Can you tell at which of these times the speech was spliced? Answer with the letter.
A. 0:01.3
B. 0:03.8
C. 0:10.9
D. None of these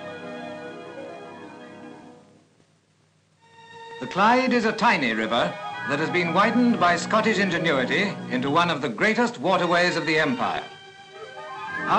A